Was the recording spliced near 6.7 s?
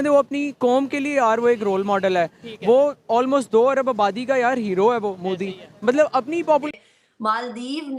yes; 1 cut; at 6.7 s

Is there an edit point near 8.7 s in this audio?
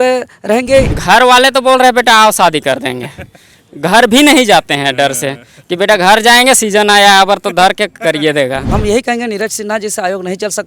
yes; 2 cuts; at 0.9 s, 8.7 s

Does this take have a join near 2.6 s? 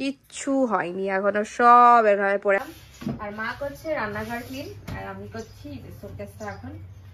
yes; 1 cut; at 2.6 s

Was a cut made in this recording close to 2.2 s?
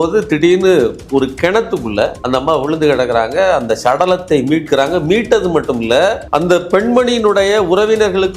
yes; 1 cut; at 2.2 s

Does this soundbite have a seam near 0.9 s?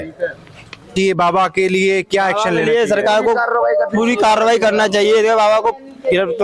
yes; 1 cut; at 0.9 s

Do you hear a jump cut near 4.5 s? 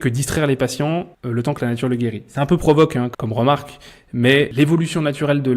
yes; 3 cuts; at 1.2 s, 3.1 s, 4.5 s

